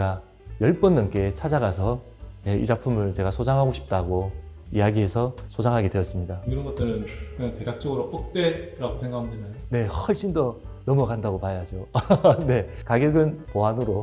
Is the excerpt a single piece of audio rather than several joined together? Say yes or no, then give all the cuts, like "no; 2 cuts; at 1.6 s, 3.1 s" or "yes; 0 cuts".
no; 1 cut; at 6.4 s